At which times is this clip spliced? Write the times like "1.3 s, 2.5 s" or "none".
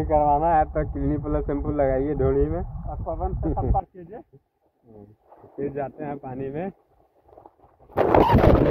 none